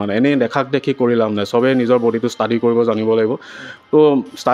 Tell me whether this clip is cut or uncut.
uncut